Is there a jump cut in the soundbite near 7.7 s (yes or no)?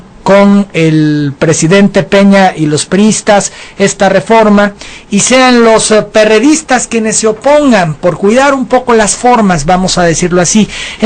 no